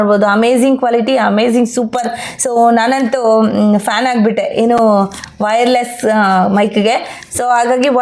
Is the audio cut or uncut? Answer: uncut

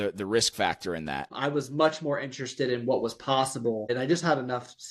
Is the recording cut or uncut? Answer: cut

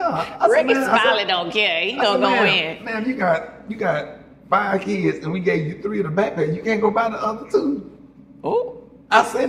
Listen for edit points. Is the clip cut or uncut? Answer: uncut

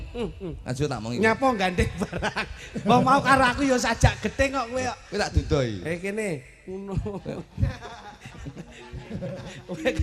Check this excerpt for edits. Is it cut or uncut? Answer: uncut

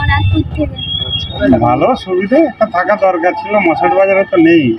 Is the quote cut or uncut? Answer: cut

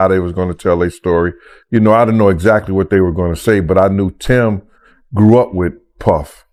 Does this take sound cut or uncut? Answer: uncut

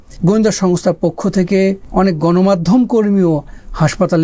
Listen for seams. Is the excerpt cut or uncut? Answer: cut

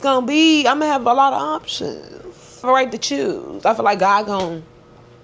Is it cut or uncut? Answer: cut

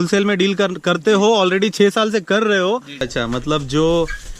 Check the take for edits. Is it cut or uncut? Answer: cut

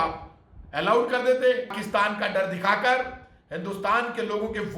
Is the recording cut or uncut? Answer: cut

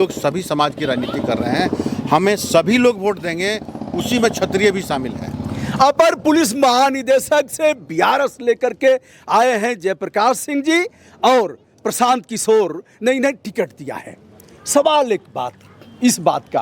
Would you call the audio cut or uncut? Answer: uncut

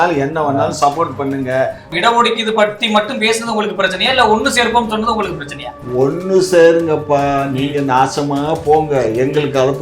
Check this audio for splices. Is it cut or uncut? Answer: cut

